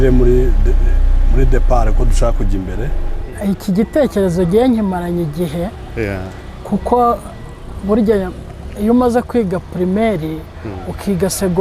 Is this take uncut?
no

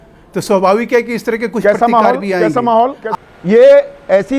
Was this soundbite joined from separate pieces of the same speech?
yes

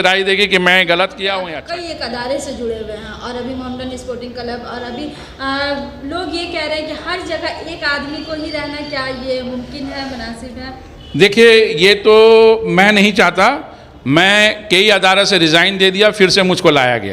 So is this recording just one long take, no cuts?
no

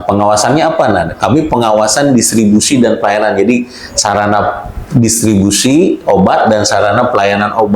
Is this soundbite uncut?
yes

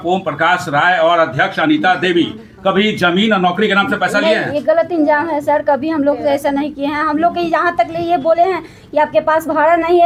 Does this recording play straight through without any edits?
yes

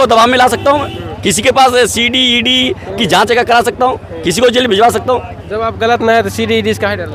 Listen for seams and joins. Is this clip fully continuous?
yes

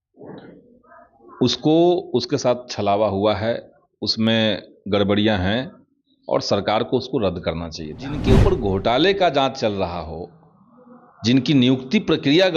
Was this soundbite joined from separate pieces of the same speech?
yes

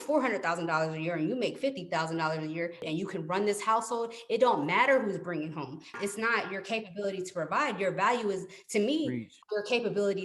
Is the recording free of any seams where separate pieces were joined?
no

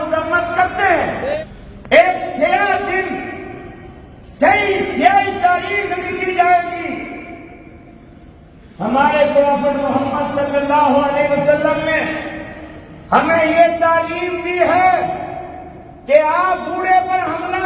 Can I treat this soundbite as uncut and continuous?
no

